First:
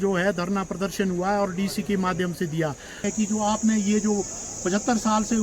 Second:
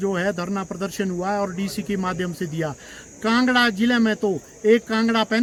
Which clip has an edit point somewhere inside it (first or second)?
first